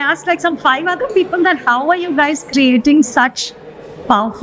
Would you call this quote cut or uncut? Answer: uncut